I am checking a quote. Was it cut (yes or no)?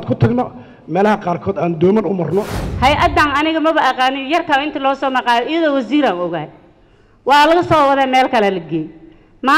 yes